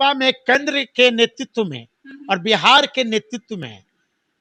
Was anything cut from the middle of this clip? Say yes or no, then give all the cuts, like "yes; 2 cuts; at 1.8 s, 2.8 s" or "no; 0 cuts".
no; 0 cuts